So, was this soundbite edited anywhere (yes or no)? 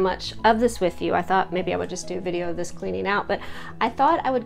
no